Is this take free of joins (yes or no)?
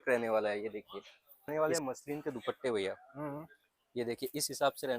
no